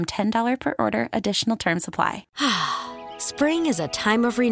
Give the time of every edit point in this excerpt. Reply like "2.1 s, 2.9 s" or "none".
2.3 s